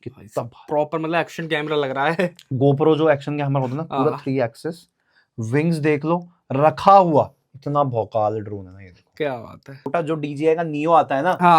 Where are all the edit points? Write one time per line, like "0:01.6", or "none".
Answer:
0:09.9